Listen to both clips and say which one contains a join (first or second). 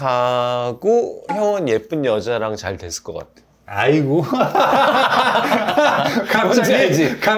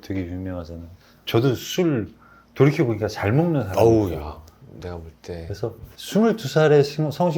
second